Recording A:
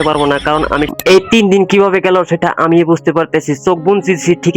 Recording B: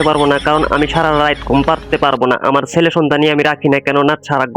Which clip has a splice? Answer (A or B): A